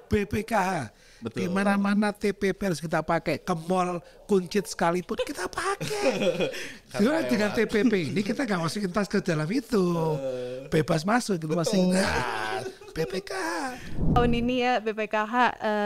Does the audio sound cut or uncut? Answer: cut